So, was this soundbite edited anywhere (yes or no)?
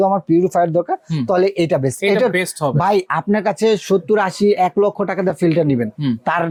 no